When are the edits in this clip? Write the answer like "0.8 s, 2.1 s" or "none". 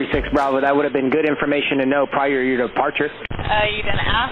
3.3 s